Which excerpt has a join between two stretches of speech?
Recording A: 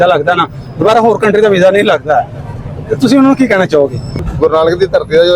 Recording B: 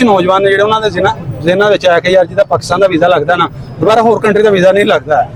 A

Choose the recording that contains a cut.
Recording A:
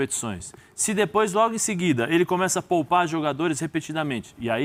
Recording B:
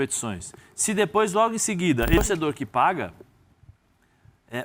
B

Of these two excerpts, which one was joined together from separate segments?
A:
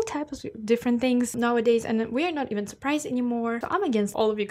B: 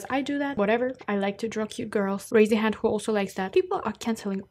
B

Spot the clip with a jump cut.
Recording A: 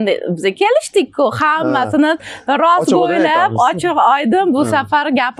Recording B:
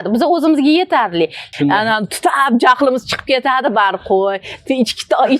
B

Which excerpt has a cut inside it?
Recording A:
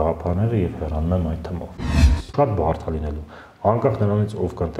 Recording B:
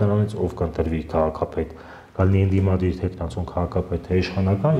A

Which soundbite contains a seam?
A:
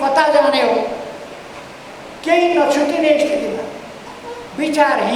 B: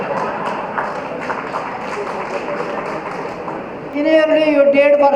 B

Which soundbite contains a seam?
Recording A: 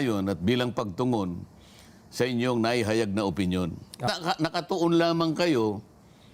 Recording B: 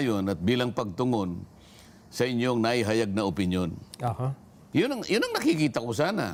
A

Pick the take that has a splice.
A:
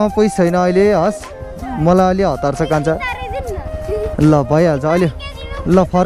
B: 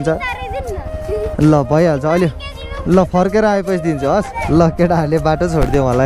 B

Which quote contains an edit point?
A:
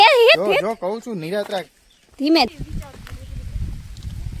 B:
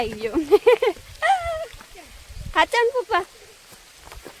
A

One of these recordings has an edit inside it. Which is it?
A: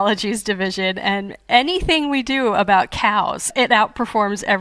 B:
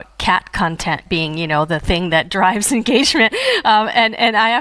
A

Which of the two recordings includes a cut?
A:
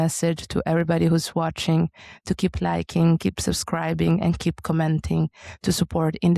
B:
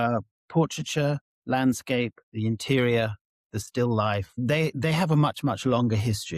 B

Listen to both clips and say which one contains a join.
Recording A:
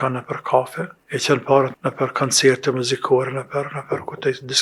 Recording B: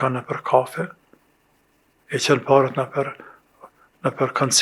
A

